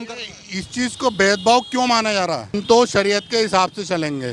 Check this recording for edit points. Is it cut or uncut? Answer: cut